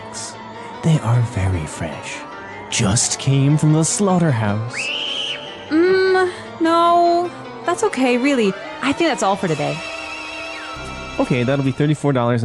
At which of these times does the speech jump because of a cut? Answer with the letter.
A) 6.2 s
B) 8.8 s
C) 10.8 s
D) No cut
C